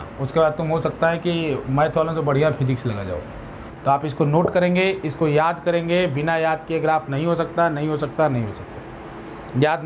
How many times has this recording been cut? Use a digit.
1